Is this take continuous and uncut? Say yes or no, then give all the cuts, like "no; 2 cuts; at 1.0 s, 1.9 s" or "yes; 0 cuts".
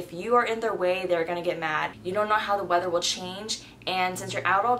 no; 1 cut; at 2.0 s